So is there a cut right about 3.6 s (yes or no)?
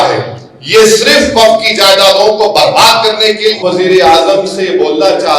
yes